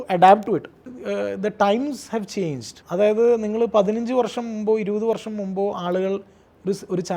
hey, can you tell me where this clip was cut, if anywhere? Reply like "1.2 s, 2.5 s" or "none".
0.9 s, 2.7 s